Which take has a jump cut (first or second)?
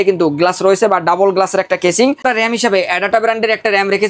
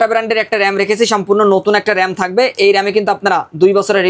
first